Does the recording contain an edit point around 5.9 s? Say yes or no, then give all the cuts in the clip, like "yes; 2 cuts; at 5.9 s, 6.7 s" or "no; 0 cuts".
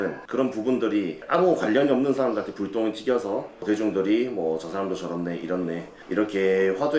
yes; 2 cuts; at 3.6 s, 5.9 s